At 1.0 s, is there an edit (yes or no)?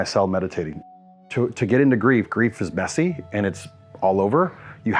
yes